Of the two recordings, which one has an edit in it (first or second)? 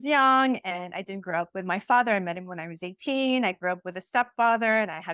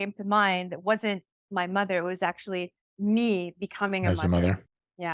second